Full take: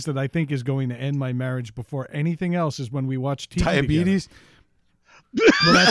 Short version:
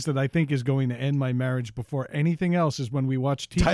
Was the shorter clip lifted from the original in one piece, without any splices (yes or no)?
yes